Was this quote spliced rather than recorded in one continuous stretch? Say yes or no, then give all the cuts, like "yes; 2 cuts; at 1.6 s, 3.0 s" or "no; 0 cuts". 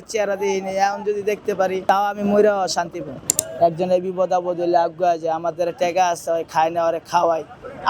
yes; 2 cuts; at 1.8 s, 3.4 s